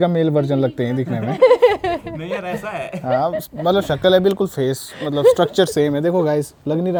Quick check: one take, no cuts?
yes; 0 cuts

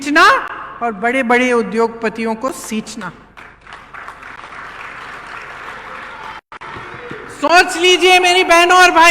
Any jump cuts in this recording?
no; 0 cuts

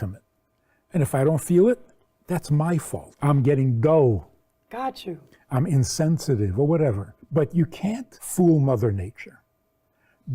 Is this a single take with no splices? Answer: no; 3 cuts; at 3.1 s, 7.1 s, 8.1 s

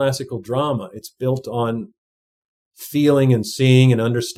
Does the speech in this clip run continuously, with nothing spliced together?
yes; 0 cuts

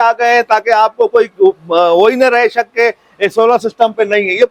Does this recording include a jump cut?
no; 0 cuts

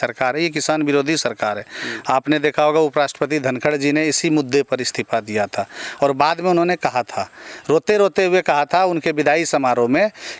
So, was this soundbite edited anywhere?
no; 0 cuts

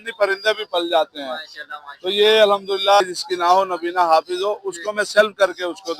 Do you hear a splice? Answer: yes; 1 cut; at 3.0 s

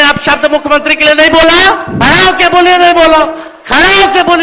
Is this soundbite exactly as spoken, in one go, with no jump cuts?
no; 1 cut; at 1.9 s

